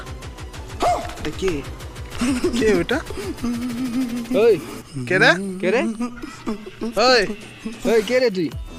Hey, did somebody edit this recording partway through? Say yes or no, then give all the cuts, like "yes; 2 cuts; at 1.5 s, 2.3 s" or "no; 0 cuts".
no; 0 cuts